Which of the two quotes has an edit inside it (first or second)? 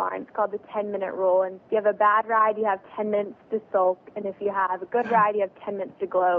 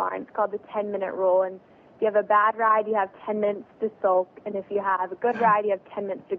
first